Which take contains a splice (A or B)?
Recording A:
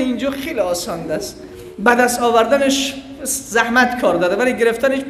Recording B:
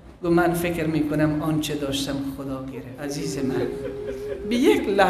B